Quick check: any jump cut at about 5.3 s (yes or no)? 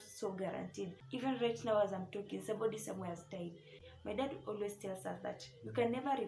no